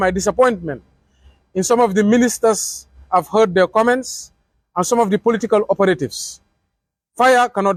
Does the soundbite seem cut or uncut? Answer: uncut